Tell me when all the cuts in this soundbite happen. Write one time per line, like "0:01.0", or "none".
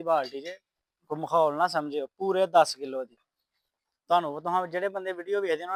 none

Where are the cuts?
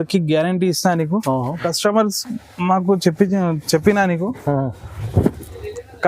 0:01.6

